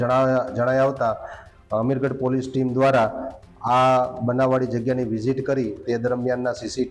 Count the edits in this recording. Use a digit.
1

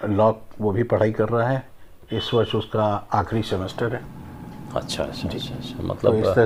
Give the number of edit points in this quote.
0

